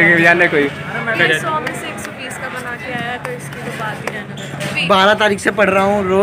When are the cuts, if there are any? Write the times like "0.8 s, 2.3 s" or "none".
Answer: 1.2 s, 4.7 s